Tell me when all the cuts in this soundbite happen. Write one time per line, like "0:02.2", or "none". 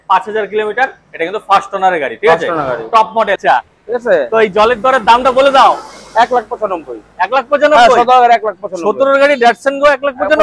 0:03.4